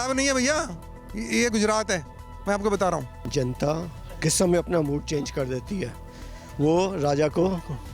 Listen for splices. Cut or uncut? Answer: cut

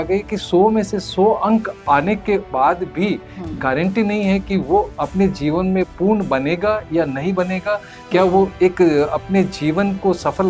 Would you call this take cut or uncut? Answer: uncut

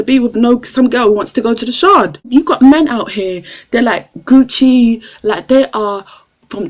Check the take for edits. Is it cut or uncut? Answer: cut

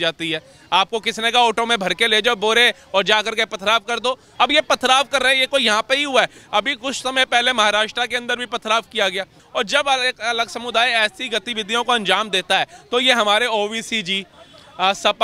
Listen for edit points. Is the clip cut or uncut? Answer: cut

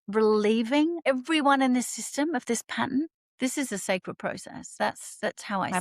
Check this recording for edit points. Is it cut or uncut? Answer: cut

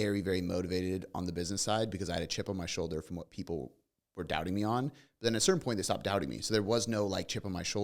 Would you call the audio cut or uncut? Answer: uncut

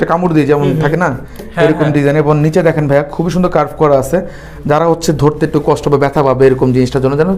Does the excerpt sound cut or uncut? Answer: uncut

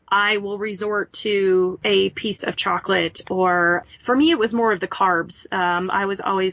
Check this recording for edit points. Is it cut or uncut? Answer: cut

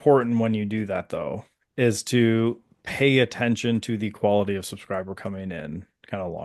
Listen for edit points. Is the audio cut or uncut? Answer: uncut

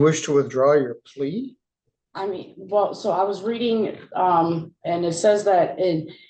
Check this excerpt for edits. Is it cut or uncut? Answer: uncut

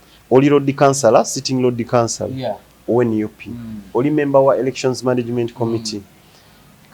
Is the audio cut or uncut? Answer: uncut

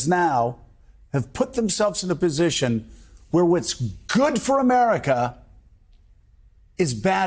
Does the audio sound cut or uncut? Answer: uncut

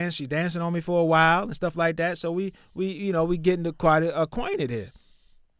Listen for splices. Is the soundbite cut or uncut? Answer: uncut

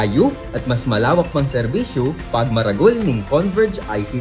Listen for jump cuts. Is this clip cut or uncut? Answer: uncut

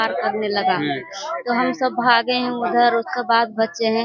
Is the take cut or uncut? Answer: uncut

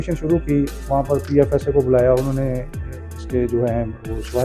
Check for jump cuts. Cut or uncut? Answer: uncut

